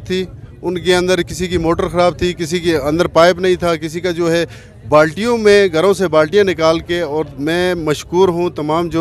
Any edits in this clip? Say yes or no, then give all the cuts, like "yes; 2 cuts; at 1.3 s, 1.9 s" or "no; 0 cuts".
no; 0 cuts